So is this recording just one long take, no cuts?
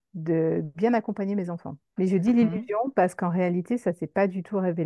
yes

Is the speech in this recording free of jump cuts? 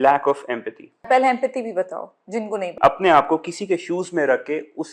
no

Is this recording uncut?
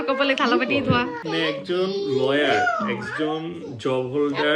no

